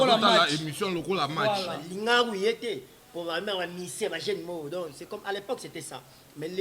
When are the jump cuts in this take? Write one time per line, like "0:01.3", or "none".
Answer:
0:01.8